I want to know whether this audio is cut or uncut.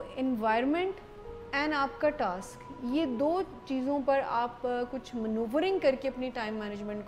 uncut